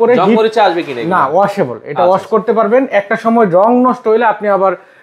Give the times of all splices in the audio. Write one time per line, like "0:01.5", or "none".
none